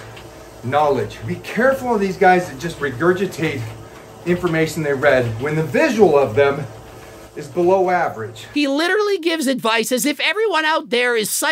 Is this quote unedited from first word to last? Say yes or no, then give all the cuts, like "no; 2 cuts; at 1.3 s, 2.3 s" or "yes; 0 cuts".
no; 4 cuts; at 1.2 s, 2.7 s, 5.4 s, 8.4 s